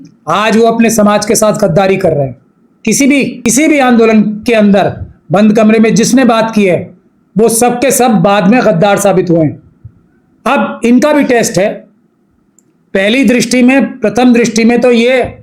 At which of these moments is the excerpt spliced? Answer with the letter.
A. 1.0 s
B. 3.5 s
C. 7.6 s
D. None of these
B